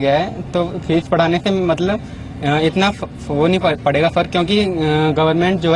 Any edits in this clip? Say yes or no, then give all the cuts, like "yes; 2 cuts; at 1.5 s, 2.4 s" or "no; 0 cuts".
no; 0 cuts